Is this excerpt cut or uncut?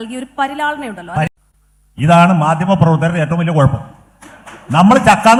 uncut